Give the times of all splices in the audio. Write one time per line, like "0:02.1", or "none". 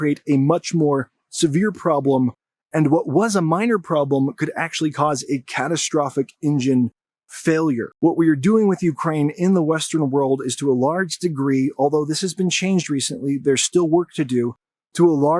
0:07.9